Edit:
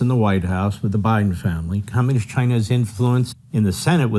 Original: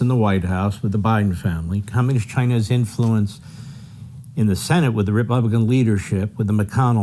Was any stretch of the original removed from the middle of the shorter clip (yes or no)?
yes